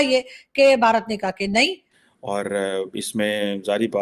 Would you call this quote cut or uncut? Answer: cut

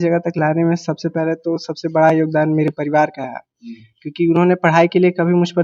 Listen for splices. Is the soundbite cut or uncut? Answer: uncut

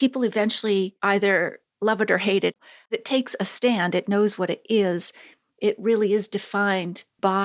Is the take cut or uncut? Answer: cut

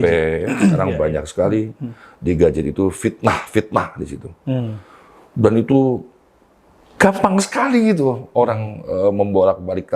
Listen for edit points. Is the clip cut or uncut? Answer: uncut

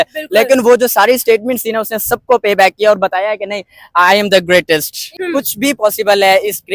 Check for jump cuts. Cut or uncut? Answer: cut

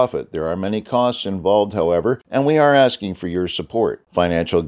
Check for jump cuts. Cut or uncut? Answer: cut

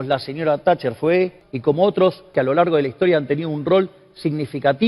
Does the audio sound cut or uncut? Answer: cut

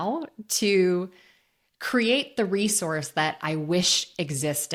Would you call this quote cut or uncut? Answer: uncut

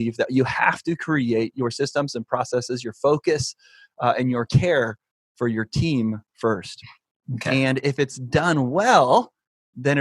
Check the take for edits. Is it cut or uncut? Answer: uncut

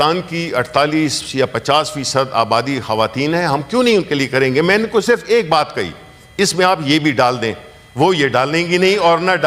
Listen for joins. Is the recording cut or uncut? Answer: uncut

